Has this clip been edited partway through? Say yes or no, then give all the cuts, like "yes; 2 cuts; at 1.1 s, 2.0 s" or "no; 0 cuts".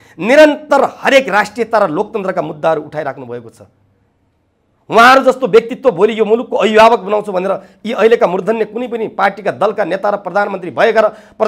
no; 0 cuts